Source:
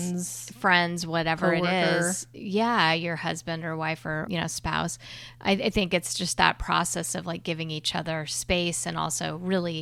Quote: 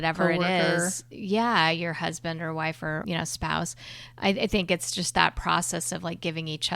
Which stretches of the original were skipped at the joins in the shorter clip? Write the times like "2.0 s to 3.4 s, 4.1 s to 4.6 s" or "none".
none

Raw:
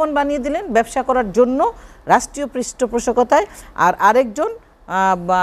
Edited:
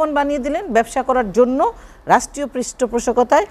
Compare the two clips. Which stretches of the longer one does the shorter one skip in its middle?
none

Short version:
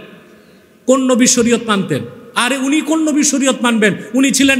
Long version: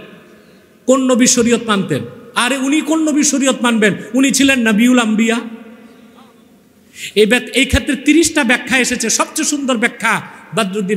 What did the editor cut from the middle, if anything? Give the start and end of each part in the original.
none

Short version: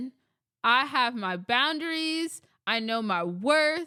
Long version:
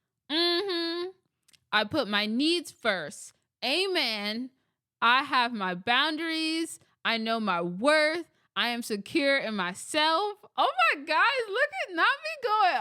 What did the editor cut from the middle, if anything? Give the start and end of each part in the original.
none

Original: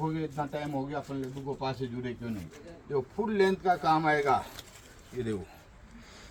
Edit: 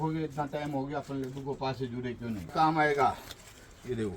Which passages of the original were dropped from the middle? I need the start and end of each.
2.5 s to 3.8 s

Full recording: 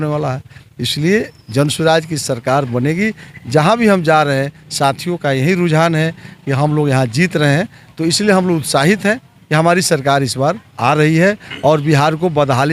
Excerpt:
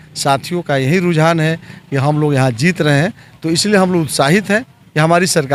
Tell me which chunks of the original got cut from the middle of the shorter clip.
none

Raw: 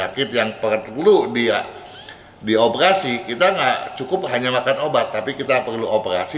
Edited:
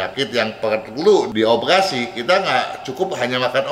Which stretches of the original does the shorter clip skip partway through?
1.3 s to 2.4 s

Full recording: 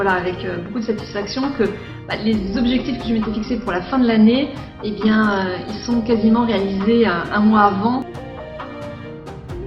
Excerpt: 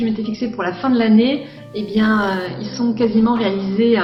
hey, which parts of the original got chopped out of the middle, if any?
none

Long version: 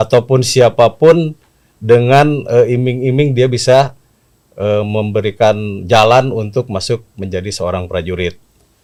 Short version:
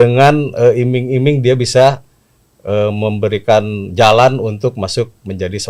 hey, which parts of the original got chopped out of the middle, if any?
none

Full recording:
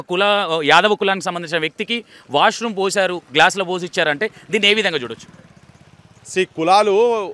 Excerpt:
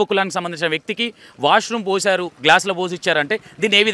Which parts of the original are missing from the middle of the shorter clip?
none

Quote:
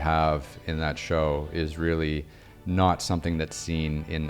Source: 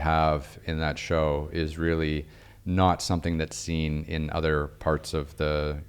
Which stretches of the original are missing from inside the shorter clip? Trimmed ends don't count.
none

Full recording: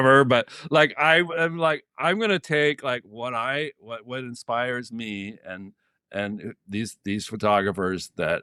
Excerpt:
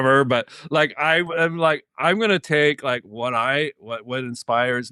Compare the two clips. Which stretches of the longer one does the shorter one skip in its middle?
none

